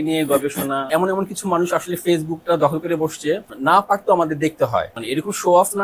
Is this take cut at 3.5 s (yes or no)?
yes